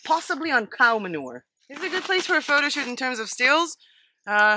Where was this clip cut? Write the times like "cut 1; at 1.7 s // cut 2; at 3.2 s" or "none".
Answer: cut 1; at 1.4 s

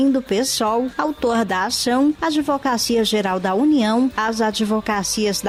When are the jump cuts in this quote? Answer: none

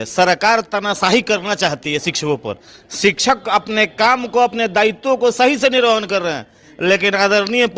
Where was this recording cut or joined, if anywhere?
none

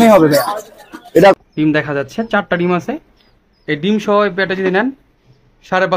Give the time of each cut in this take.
cut 1; at 1.4 s

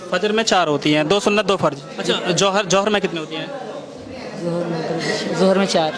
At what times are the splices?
cut 1; at 1.9 s

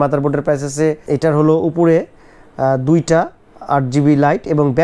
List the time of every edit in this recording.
cut 1; at 1.0 s

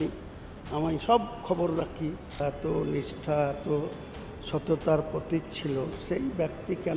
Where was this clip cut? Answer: cut 1; at 2.4 s

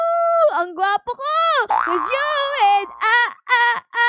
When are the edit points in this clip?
cut 1; at 1.9 s

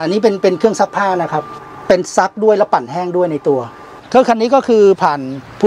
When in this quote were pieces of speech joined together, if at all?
cut 1; at 1.5 s // cut 2; at 4.0 s

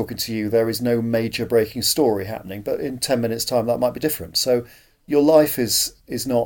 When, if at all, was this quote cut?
none

